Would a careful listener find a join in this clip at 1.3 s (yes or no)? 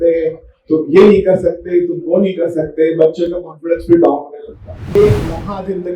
no